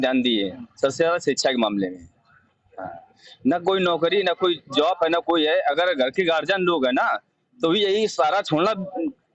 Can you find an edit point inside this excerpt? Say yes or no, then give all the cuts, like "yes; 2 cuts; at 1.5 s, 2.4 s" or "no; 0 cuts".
no; 0 cuts